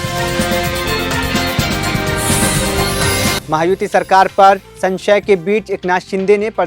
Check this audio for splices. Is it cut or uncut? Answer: uncut